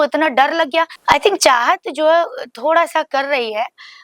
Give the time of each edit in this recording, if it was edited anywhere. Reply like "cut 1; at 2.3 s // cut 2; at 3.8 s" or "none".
cut 1; at 0.9 s